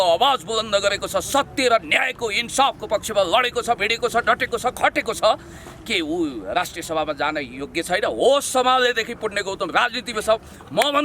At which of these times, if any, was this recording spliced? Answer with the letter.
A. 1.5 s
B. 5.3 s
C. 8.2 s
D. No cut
D